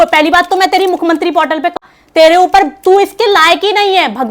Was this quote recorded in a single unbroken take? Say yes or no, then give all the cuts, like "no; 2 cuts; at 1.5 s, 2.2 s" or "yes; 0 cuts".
no; 1 cut; at 1.8 s